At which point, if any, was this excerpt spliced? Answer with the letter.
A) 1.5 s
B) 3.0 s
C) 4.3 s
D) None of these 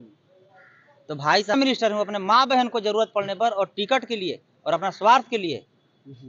A